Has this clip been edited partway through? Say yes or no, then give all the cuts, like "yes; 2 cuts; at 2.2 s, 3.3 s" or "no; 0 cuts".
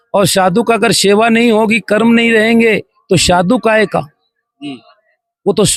no; 0 cuts